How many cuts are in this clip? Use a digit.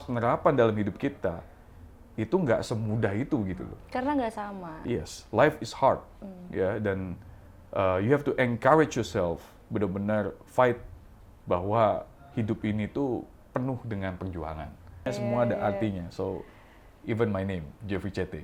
1